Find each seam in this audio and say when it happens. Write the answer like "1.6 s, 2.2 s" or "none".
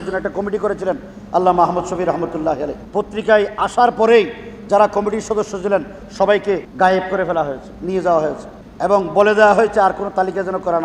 2.8 s, 6.7 s